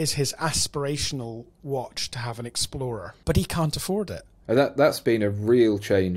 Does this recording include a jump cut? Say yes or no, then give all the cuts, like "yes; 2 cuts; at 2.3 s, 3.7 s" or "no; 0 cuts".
yes; 2 cuts; at 3.1 s, 4.3 s